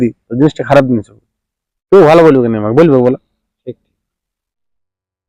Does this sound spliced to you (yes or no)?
no